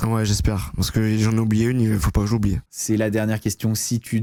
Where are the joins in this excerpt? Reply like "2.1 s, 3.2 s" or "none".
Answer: none